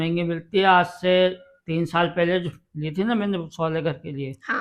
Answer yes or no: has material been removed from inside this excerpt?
no